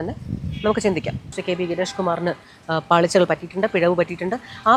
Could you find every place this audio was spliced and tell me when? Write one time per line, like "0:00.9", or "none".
0:01.4

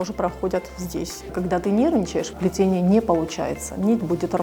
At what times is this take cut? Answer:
0:01.3
0:02.3

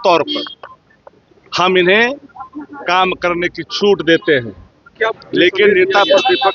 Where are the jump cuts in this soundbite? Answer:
0:04.9

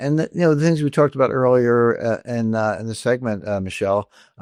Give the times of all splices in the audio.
none

